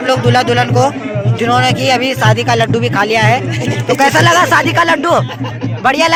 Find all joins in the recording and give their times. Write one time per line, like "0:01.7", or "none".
none